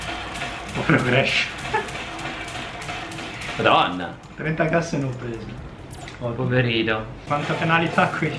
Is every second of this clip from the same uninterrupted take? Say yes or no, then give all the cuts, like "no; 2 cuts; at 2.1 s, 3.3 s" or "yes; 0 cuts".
no; 1 cut; at 7.2 s